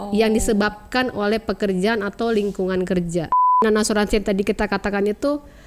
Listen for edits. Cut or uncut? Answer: cut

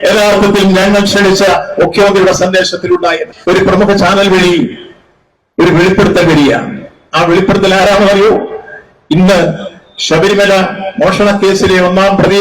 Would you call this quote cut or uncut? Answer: cut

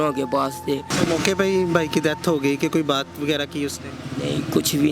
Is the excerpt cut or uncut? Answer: cut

